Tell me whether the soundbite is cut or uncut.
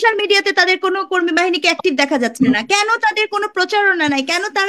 uncut